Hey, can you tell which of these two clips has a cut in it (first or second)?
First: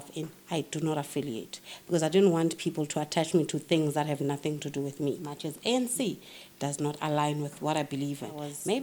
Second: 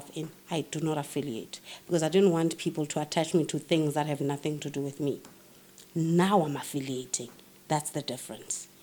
first